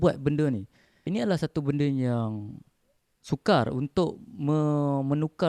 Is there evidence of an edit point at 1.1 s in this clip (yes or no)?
yes